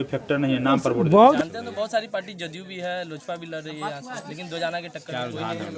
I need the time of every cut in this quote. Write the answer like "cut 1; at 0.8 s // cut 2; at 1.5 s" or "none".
cut 1; at 1.4 s